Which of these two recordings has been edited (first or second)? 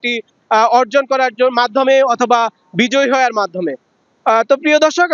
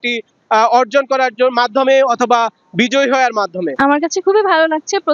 second